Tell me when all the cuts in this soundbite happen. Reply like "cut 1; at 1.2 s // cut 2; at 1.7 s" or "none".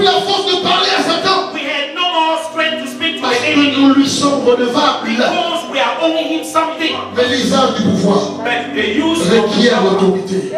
cut 1; at 7.0 s